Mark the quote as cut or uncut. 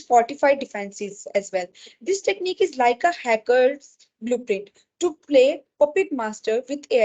uncut